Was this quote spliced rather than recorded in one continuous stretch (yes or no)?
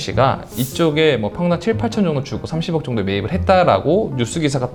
no